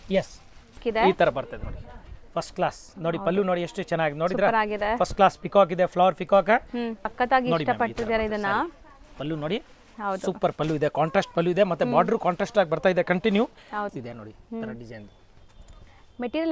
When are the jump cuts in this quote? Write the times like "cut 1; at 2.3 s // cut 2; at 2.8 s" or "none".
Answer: cut 1; at 0.8 s // cut 2; at 7.0 s // cut 3; at 13.9 s